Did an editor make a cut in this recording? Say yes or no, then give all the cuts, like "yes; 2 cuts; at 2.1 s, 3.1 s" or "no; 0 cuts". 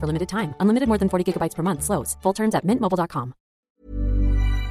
yes; 1 cut; at 3.6 s